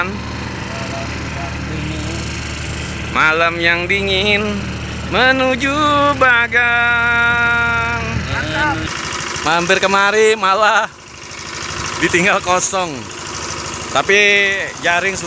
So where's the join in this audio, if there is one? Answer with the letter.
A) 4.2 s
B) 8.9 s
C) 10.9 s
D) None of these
B